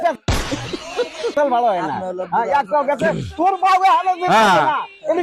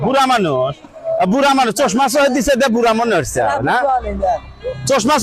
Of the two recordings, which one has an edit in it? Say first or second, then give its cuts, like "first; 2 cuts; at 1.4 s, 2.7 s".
first; 1 cut; at 1.3 s